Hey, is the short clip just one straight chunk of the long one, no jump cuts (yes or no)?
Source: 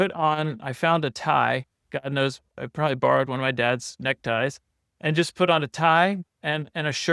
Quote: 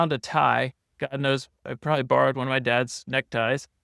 yes